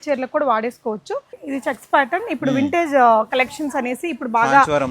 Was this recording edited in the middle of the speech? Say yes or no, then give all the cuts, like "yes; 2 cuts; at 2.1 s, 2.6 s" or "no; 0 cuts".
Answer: yes; 1 cut; at 1.4 s